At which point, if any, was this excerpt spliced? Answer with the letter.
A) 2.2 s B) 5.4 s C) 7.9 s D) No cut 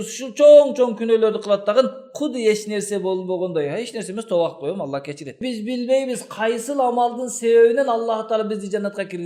B